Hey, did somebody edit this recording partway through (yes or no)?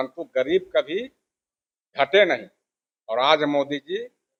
no